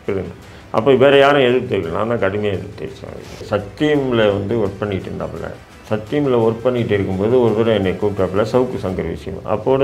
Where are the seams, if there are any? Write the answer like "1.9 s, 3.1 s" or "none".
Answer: 3.4 s

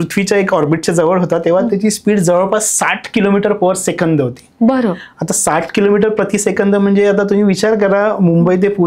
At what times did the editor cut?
none

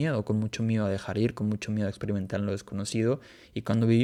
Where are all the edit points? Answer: none

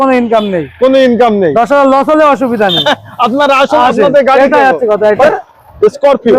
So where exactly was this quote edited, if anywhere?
none

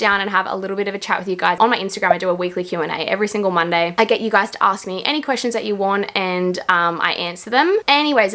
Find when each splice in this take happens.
none

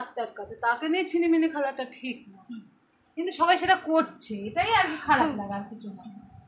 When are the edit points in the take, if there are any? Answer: none

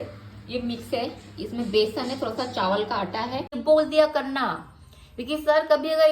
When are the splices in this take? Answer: 3.5 s

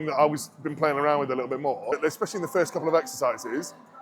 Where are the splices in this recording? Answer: 1.9 s

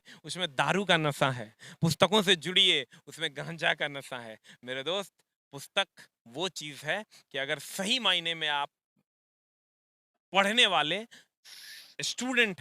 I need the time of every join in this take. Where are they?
none

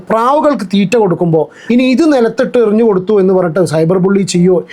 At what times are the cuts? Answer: 1.6 s

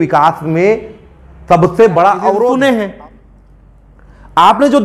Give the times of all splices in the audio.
2.5 s

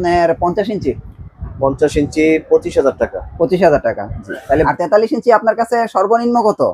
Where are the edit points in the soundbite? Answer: 4.7 s

